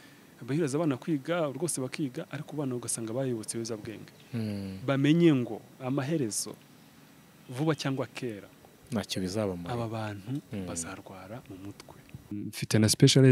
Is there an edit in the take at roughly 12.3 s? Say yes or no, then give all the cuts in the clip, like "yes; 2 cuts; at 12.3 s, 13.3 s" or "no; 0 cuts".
yes; 1 cut; at 12.3 s